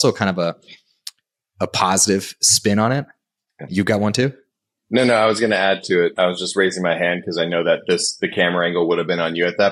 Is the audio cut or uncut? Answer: uncut